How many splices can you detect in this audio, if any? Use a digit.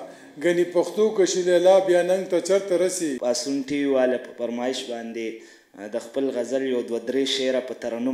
1